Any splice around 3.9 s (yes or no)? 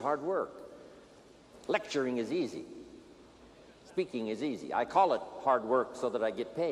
no